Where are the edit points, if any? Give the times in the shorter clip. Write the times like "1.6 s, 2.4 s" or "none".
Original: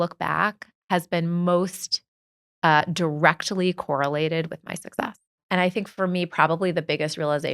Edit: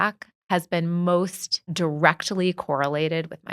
1.7 s